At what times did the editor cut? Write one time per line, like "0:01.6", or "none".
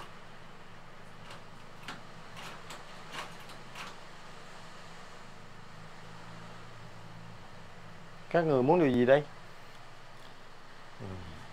none